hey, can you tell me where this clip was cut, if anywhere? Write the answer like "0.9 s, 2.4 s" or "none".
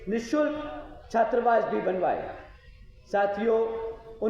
none

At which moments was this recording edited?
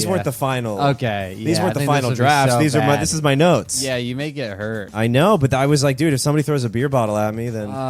3.8 s, 4.9 s

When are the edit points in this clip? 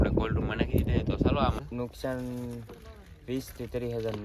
1.6 s

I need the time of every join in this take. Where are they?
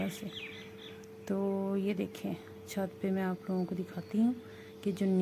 none

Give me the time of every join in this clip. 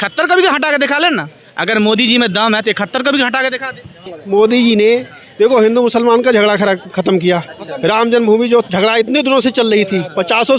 4.1 s

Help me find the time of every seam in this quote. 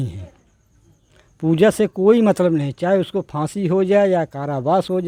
none

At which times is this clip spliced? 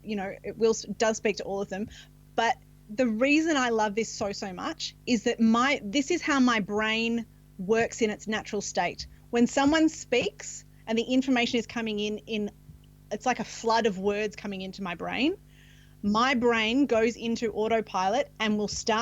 2.8 s

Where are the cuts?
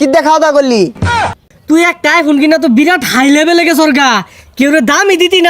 1.1 s

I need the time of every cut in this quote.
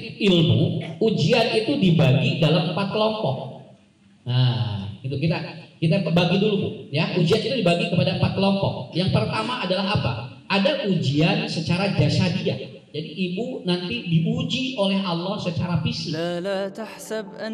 16.1 s

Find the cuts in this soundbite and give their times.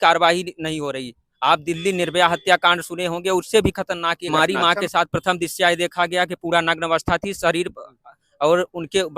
4.3 s

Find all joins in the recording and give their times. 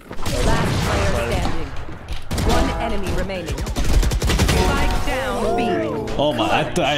none

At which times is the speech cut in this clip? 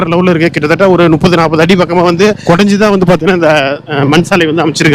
2.4 s, 3.8 s

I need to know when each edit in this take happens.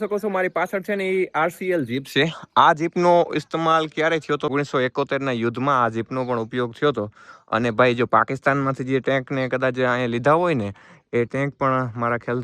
4.5 s

